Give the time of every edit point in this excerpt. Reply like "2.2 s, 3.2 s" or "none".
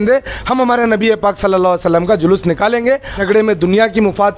3.2 s